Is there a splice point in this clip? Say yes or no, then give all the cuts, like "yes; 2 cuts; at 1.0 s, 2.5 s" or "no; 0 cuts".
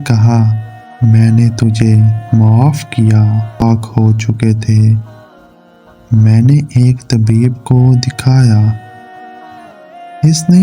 yes; 1 cut; at 3.6 s